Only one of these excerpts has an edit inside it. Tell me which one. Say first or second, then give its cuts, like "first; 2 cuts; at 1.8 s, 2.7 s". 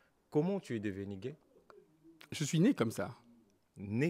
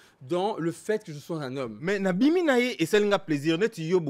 second; 1 cut; at 1.8 s